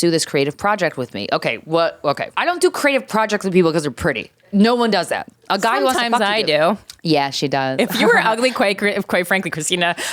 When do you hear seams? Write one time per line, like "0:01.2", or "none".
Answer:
0:02.3
0:04.4
0:06.9